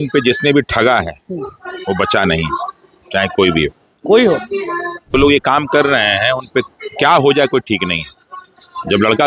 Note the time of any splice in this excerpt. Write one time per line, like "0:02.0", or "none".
0:05.1